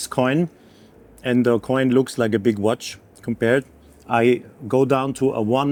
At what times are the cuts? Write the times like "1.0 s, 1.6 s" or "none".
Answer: none